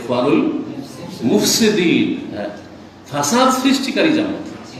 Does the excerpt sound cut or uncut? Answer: uncut